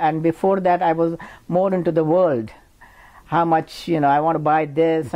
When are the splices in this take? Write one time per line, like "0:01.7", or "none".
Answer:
none